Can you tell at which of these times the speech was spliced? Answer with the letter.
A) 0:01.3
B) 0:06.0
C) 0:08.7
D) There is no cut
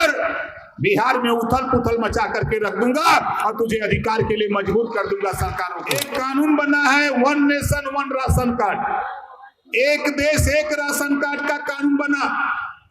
B